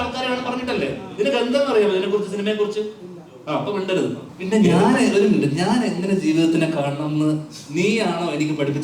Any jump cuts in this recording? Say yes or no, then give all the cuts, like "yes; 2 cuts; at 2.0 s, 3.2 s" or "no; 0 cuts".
yes; 1 cut; at 4.3 s